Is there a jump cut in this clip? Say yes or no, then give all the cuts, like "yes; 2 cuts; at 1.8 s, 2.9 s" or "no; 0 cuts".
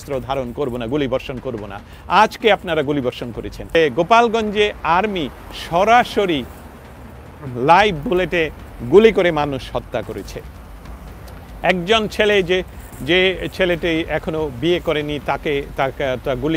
yes; 1 cut; at 3.7 s